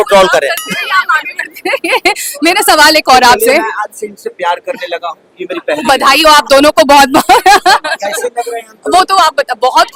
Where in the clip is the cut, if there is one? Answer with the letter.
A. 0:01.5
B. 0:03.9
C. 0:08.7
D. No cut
D